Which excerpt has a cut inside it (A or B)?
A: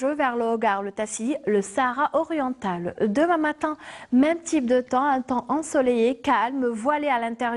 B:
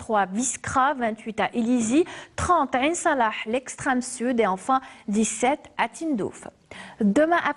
A